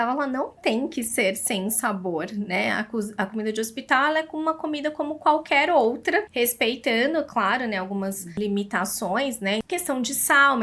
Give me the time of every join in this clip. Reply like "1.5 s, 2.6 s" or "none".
6.3 s, 8.4 s, 9.6 s